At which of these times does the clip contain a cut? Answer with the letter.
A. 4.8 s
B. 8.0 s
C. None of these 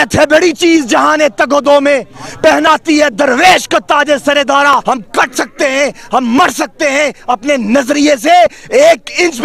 A